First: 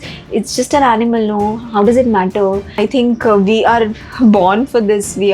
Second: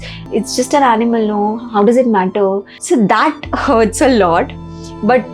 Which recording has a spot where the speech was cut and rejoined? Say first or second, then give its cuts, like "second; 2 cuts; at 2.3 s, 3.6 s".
first; 1 cut; at 2.8 s